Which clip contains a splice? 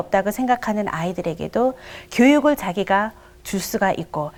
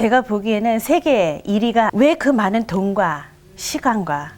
second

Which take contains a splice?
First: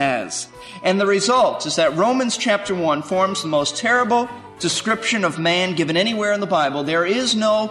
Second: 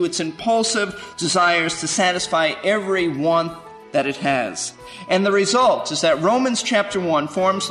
first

